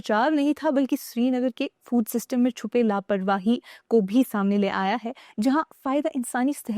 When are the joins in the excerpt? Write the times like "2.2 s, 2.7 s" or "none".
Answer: none